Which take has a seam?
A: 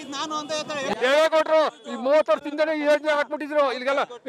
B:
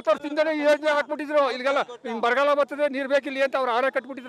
A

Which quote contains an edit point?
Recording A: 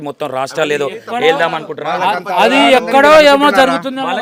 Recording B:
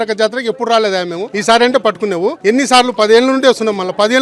B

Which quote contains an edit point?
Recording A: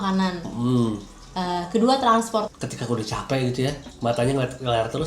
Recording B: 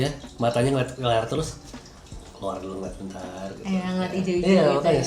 A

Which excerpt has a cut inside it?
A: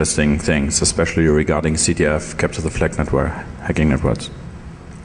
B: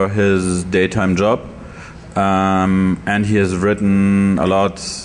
A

